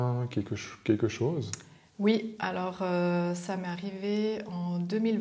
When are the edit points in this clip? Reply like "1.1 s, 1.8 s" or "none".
none